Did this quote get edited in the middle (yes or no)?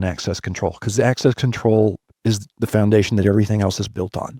no